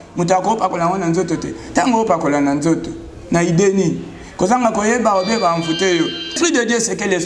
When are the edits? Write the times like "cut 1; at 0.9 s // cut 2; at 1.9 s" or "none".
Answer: cut 1; at 6.3 s